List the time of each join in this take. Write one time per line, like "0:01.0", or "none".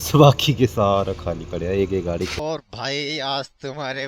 0:02.4